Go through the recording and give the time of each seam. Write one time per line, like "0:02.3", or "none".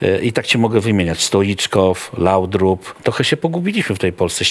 0:02.9